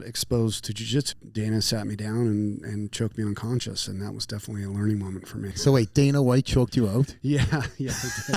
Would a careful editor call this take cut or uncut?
cut